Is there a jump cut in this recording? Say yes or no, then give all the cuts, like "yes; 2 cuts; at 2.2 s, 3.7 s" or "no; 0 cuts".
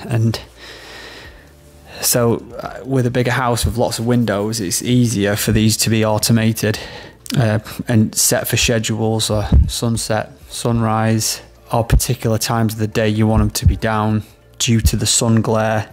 yes; 2 cuts; at 7.1 s, 11.6 s